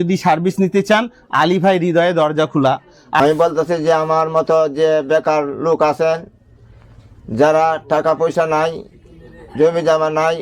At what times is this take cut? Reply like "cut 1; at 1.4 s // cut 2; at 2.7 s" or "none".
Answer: cut 1; at 3.2 s